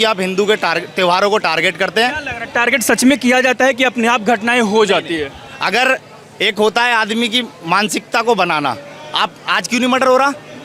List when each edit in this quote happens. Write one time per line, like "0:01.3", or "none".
none